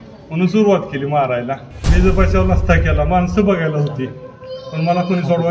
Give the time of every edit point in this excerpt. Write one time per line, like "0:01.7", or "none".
0:01.7

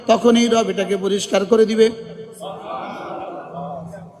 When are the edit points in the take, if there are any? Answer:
none

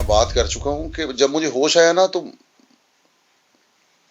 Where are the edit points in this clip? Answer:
none

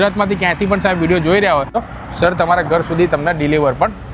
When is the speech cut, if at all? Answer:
0:01.9

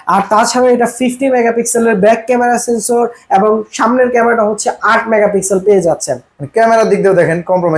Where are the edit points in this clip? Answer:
none

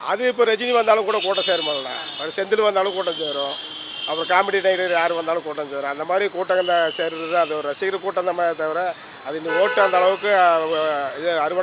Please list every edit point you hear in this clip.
none

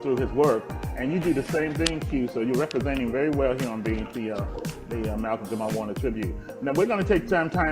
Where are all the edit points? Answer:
0:05.7

